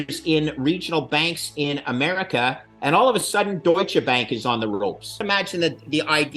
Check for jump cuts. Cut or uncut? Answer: cut